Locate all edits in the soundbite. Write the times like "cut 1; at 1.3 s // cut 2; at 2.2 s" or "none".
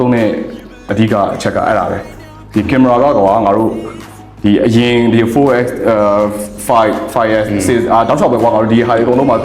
cut 1; at 0.9 s

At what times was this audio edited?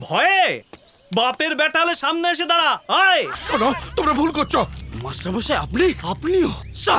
cut 1; at 3.4 s

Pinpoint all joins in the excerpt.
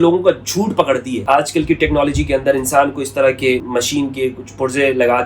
cut 1; at 1.2 s // cut 2; at 3.6 s

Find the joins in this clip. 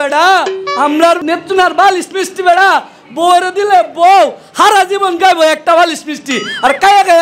cut 1; at 1.2 s

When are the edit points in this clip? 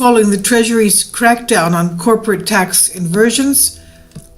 cut 1; at 2.2 s

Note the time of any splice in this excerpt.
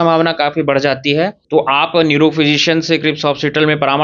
cut 1; at 1.4 s

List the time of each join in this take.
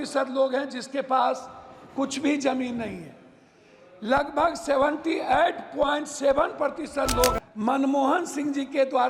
cut 1; at 7.4 s

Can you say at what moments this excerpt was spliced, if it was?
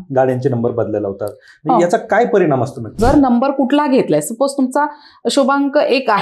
cut 1; at 3.0 s

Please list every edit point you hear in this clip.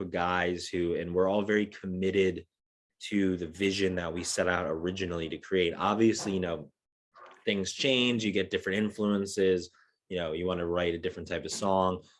none

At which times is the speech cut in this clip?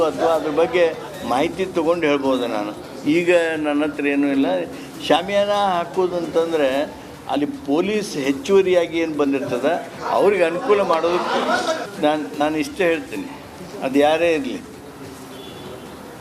cut 1; at 10.9 s

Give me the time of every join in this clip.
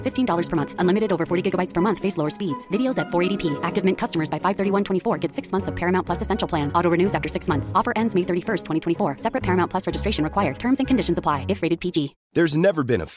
none

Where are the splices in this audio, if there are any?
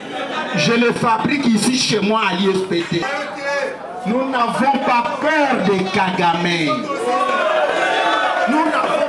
cut 1; at 3.0 s

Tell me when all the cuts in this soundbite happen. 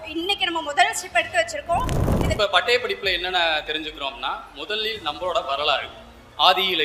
cut 1; at 2.4 s

